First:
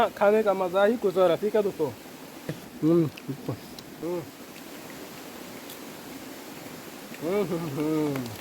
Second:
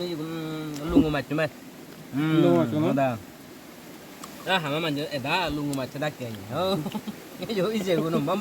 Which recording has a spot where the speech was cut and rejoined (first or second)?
first